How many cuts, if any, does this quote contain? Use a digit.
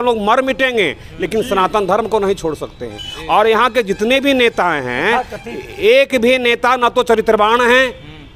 0